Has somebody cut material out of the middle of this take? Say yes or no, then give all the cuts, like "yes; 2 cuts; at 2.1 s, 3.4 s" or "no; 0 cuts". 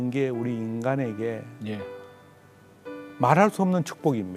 no; 0 cuts